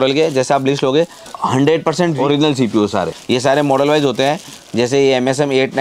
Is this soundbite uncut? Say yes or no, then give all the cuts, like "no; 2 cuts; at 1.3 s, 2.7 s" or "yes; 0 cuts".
no; 3 cuts; at 1.2 s, 2.2 s, 3.2 s